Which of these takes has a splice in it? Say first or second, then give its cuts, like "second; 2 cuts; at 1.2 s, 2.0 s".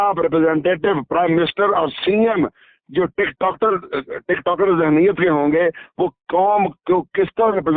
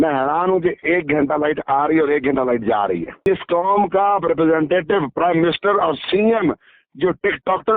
second; 1 cut; at 3.1 s